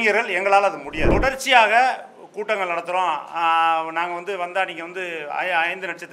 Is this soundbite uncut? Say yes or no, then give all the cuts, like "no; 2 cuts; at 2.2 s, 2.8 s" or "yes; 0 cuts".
no; 1 cut; at 1.0 s